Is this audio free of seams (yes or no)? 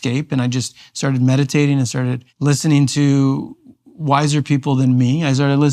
no